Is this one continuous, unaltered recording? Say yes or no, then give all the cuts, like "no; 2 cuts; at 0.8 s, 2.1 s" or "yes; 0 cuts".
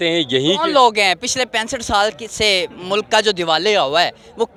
yes; 0 cuts